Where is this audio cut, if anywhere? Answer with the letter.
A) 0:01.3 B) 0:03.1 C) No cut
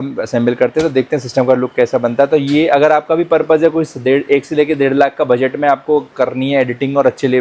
C